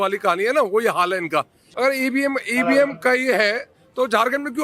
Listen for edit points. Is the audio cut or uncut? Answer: cut